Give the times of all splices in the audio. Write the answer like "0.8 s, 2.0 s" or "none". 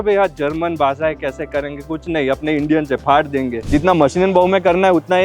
3.7 s